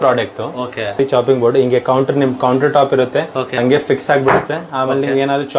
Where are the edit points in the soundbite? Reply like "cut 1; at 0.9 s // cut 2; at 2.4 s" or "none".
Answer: cut 1; at 1.0 s // cut 2; at 3.6 s